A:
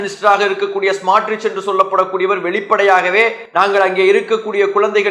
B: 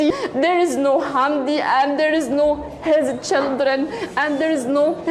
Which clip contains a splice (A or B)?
A